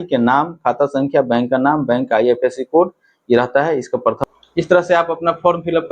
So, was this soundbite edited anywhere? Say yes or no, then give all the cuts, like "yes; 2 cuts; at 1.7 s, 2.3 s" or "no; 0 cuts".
yes; 1 cut; at 4.2 s